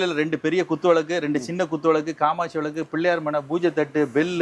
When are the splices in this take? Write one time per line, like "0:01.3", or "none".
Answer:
none